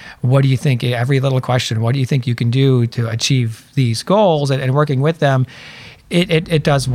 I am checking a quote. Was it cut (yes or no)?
yes